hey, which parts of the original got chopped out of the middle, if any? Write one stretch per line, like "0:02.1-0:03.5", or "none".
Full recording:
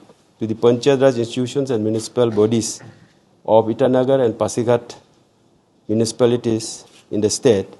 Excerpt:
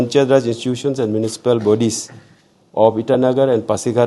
none